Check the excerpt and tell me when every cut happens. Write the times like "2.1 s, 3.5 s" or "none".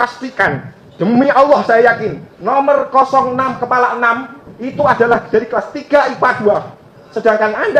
none